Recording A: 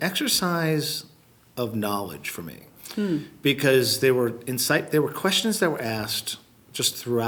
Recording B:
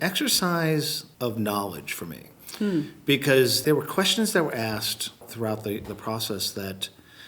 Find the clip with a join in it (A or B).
B